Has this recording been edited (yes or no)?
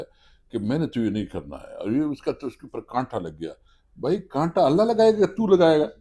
no